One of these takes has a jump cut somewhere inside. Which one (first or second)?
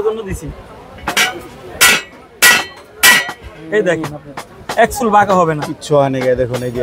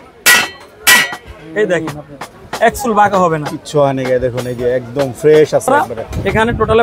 second